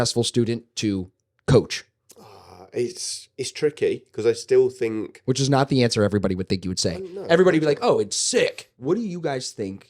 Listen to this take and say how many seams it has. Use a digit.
1